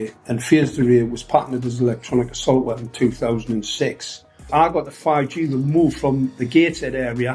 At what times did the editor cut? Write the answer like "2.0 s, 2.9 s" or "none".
4.4 s